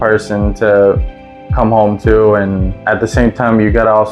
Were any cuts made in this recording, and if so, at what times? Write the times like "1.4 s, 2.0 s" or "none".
2.8 s